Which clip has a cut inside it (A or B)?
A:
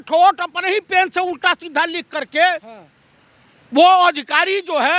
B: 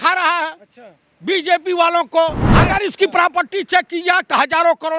B